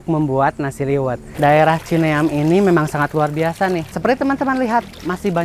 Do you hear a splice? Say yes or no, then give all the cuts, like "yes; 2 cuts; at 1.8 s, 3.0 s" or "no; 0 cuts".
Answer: yes; 2 cuts; at 1.2 s, 3.9 s